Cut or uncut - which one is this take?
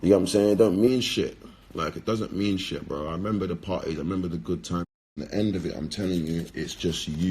cut